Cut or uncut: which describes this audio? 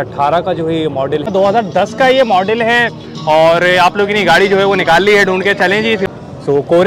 cut